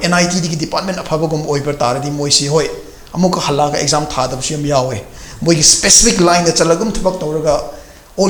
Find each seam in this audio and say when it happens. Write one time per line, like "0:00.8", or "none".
none